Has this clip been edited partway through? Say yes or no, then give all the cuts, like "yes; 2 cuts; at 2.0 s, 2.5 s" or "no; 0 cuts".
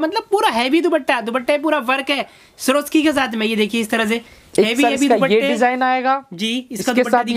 no; 0 cuts